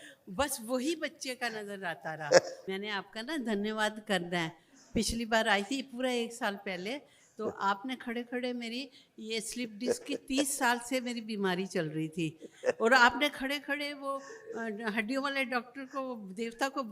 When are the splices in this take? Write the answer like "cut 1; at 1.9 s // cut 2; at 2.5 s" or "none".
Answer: cut 1; at 2.6 s